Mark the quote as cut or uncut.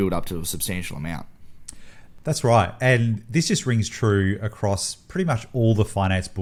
uncut